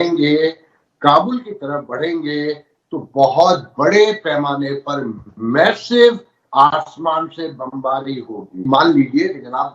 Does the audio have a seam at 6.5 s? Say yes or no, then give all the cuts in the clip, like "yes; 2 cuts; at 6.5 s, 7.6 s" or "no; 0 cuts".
no; 1 cut; at 8.6 s